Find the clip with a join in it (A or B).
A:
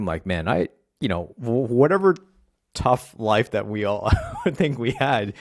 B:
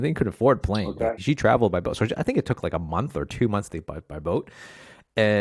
B